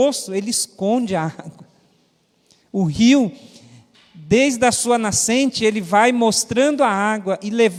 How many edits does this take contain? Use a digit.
0